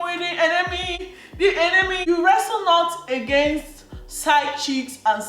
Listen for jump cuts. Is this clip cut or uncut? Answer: cut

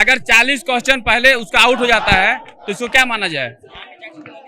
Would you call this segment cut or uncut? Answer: uncut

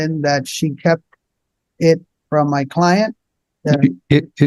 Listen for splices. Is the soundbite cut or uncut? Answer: uncut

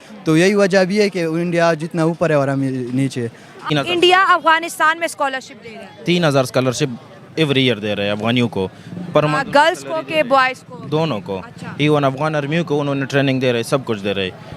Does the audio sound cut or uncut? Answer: cut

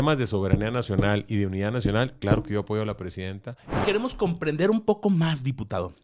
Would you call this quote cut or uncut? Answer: cut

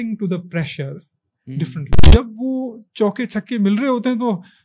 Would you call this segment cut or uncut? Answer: cut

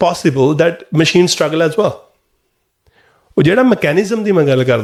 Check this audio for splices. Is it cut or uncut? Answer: uncut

